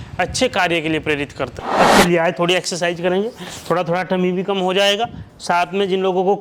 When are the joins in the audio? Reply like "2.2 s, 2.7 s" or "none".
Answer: 1.6 s